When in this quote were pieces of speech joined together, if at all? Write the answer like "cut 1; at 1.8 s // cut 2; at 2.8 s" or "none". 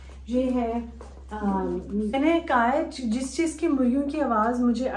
cut 1; at 2.1 s